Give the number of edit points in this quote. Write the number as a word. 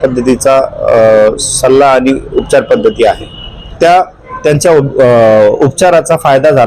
one